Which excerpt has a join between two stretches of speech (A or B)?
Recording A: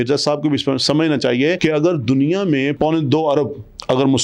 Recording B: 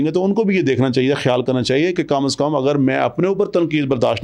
A